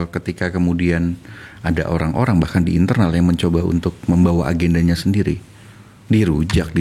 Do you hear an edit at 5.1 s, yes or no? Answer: no